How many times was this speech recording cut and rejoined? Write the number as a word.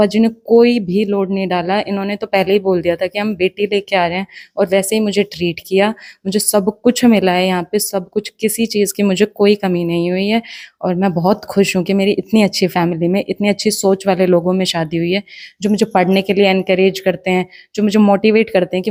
zero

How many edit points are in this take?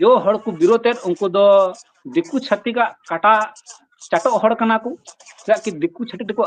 zero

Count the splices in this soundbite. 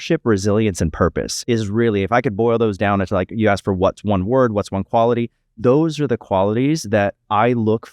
one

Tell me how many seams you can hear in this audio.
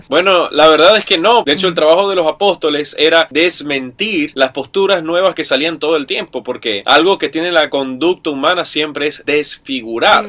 three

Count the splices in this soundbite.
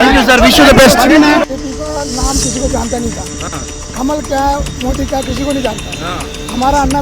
one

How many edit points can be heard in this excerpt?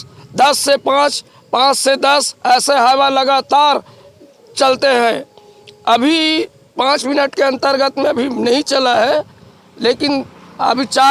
zero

